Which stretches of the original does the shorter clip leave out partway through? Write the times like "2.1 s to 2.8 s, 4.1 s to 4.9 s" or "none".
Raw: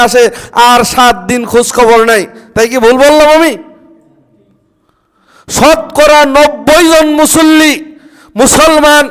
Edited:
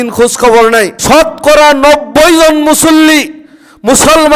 2.3 s to 5.5 s